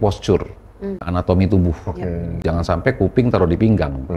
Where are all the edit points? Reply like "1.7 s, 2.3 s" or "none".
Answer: 1.1 s, 2.4 s